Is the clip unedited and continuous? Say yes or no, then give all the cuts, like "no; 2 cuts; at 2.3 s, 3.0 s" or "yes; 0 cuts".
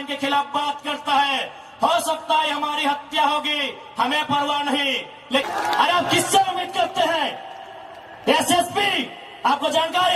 no; 1 cut; at 5.5 s